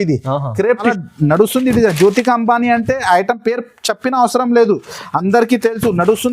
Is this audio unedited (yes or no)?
no